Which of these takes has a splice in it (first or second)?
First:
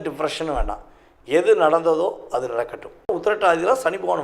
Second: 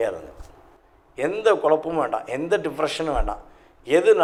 first